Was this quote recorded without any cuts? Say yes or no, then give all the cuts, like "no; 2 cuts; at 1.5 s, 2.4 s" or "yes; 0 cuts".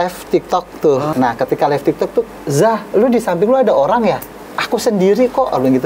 no; 2 cuts; at 1.1 s, 2.3 s